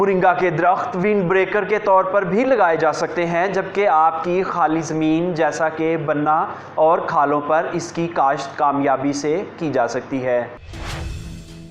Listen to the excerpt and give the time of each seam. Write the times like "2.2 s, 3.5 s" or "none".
10.5 s